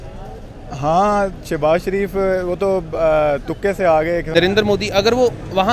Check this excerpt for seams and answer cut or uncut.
cut